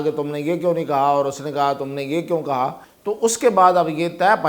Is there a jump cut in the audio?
yes; 1 cut; at 2.9 s

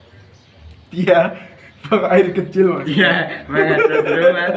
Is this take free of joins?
yes; 0 cuts

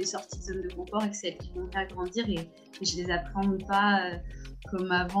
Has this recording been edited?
no; 0 cuts

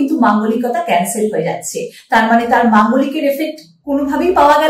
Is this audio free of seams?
yes; 0 cuts

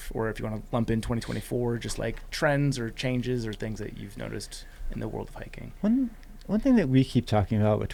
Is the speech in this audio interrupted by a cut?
no; 0 cuts

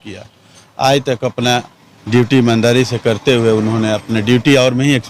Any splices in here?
no; 0 cuts

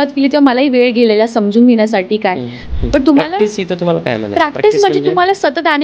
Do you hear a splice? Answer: yes; 1 cut; at 2.6 s

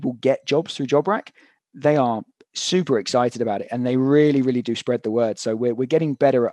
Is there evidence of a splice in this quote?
no; 0 cuts

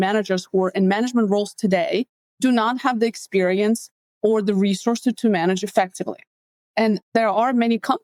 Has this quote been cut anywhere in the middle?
no; 0 cuts

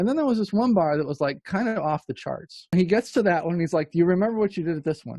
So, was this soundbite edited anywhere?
yes; 1 cut; at 2.7 s

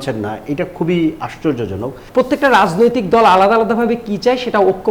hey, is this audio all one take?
no; 1 cut; at 2.0 s

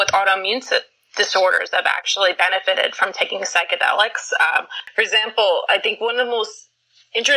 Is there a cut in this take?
yes; 1 cut; at 4.8 s

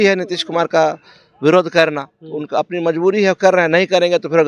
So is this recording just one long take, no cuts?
yes; 0 cuts

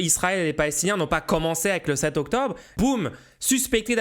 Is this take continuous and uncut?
no; 1 cut; at 2.7 s

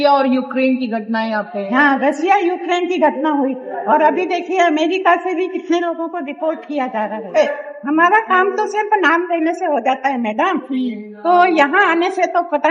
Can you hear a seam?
yes; 1 cut; at 7.3 s

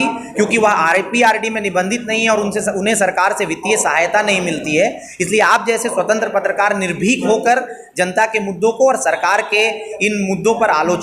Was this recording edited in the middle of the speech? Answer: no; 0 cuts

